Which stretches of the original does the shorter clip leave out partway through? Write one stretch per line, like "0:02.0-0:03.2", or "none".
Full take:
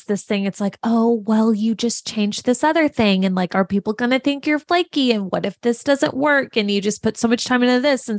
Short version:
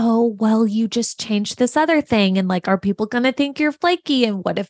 none